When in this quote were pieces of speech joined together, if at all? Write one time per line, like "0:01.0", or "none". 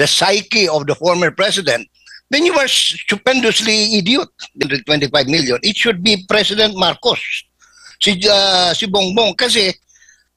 0:04.6